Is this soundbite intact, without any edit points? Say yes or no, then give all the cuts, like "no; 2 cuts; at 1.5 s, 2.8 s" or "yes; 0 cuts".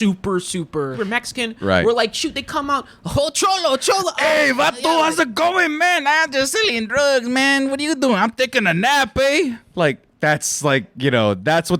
no; 1 cut; at 0.9 s